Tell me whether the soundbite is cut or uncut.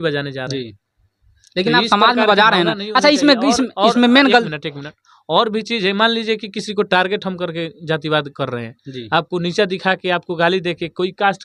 uncut